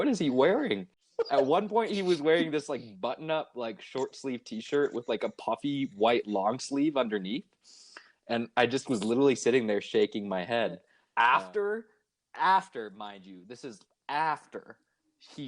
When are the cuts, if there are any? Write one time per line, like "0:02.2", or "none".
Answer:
0:10.9